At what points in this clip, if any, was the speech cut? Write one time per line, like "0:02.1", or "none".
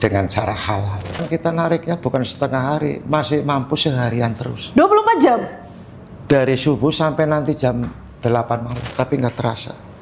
0:01.2
0:08.9

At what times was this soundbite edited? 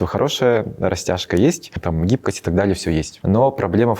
0:01.8
0:03.1

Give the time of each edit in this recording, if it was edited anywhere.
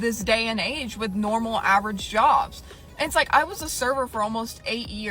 none

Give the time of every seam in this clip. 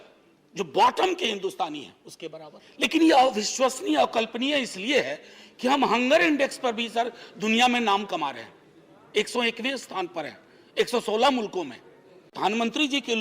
0:02.7
0:12.3

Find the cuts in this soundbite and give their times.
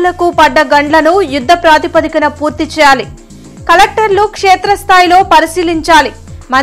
none

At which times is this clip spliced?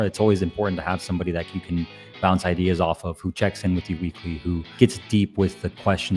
0:04.7

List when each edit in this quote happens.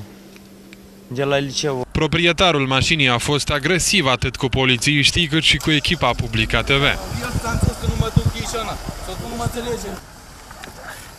0:09.2

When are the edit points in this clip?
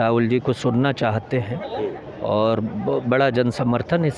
none

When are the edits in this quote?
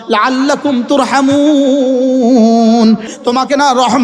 0:03.1

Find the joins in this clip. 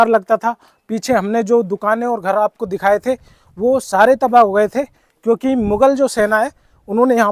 none

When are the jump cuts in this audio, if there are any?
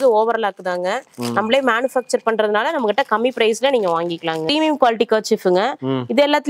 0:04.5

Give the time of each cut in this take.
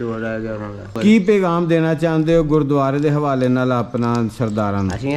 0:00.9

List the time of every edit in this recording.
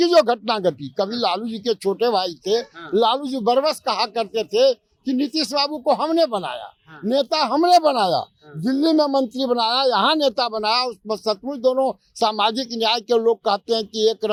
none

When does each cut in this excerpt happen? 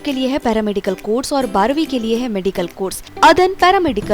0:03.1

